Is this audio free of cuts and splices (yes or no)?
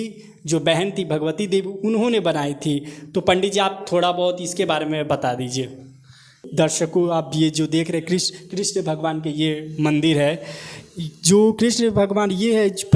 no